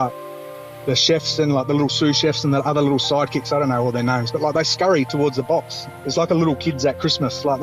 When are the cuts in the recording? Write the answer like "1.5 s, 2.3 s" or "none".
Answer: none